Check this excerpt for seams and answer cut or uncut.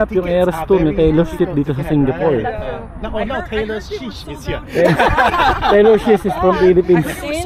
uncut